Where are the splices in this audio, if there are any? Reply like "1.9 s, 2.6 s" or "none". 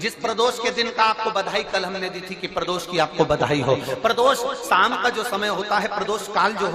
3.7 s